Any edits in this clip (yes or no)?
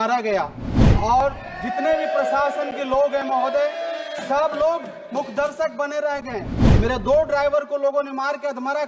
yes